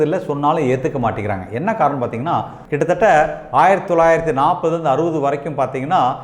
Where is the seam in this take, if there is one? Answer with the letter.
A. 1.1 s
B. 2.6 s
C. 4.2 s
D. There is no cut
B